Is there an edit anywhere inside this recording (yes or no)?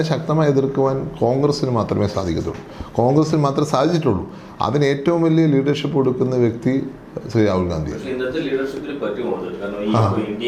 no